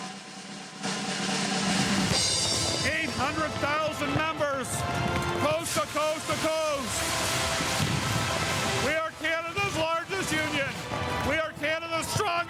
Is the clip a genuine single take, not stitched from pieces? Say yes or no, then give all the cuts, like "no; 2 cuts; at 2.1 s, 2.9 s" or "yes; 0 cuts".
yes; 0 cuts